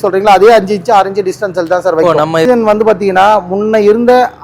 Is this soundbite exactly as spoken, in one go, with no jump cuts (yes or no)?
no